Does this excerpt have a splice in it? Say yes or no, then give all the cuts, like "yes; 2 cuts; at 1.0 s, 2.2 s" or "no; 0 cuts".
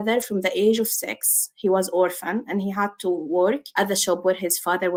no; 0 cuts